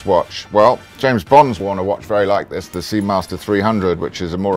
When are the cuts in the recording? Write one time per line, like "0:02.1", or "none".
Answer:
0:01.6